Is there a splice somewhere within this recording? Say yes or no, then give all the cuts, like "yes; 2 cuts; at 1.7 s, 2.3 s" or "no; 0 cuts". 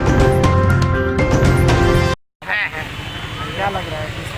no; 0 cuts